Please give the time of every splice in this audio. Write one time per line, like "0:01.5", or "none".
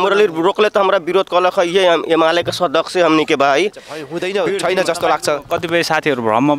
0:04.1